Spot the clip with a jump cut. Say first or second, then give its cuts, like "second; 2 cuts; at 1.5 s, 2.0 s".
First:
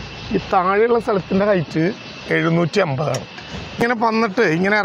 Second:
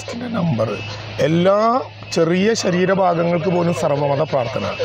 first; 1 cut; at 3.8 s